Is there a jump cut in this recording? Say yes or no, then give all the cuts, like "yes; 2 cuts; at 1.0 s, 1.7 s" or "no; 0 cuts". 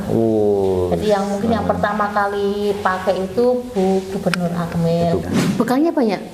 yes; 1 cut; at 5.2 s